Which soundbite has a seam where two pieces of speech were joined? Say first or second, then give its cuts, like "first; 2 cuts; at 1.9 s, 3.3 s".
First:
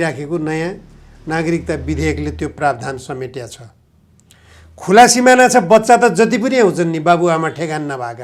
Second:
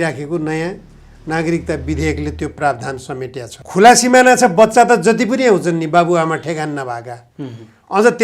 second; 1 cut; at 3.5 s